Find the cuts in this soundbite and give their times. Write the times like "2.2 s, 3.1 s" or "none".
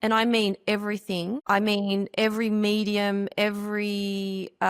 1.4 s

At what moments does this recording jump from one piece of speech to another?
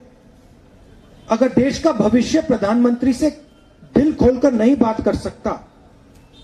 none

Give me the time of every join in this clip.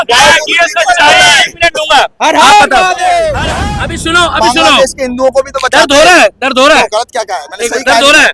3.5 s

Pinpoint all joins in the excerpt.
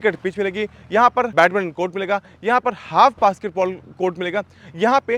1.3 s

